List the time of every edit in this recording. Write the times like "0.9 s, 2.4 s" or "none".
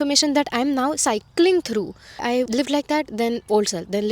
2.4 s